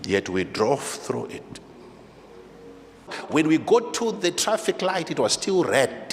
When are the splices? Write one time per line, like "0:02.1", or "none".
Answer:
0:03.2